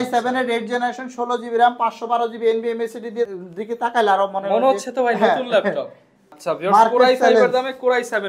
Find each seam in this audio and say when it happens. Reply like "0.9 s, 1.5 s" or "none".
3.4 s, 6.3 s

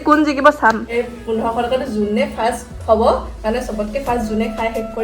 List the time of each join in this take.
0.9 s

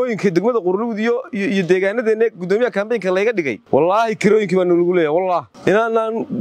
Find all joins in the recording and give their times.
3.6 s, 5.5 s

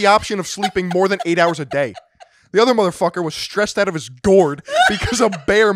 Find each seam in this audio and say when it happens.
none

